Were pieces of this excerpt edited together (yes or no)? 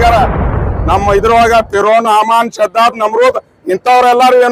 no